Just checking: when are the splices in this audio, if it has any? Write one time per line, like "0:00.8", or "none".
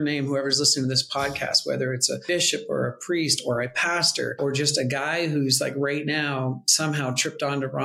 0:02.2
0:04.3